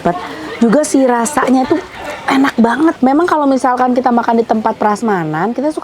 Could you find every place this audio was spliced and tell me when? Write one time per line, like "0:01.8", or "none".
0:03.0